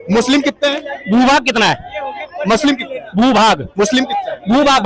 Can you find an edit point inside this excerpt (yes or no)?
no